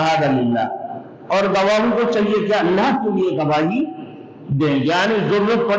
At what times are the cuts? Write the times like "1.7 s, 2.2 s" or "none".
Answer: none